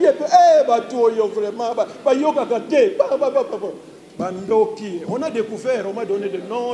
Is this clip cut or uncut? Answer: uncut